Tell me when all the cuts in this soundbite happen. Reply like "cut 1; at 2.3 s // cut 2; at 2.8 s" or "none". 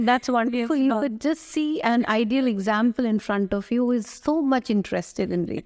none